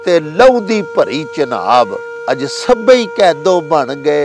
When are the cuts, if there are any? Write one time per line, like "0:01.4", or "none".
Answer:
0:02.1